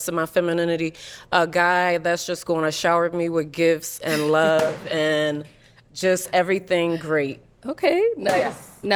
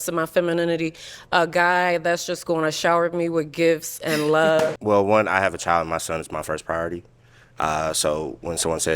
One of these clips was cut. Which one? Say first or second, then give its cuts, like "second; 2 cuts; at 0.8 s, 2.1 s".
second; 1 cut; at 4.8 s